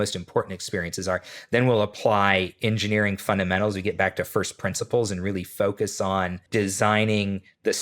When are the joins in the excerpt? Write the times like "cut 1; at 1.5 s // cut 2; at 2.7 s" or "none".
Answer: cut 1; at 6.4 s